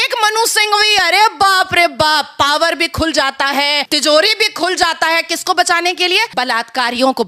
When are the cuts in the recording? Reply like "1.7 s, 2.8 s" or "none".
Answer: 3.9 s, 6.3 s

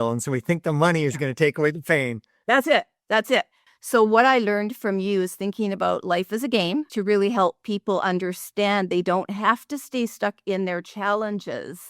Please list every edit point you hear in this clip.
3.6 s, 6.9 s

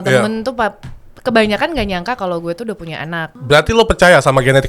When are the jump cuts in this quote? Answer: 3.3 s

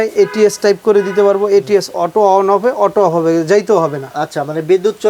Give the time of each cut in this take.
none

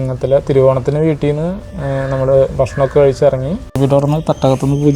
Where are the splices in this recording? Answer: 3.6 s

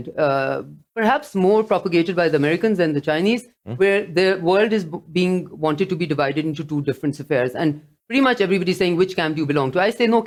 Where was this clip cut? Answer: none

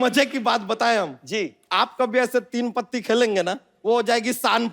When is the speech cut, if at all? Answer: 1.2 s, 3.7 s

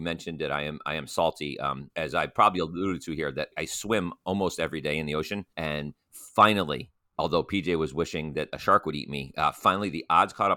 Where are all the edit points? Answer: 1.8 s, 3.5 s, 5.5 s

